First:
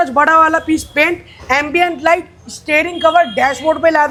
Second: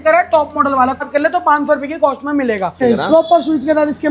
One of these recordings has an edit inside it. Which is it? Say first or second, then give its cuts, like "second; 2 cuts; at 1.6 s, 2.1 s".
second; 2 cuts; at 1.0 s, 2.8 s